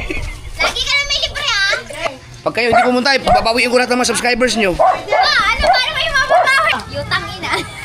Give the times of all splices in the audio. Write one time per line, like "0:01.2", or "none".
0:02.1
0:06.7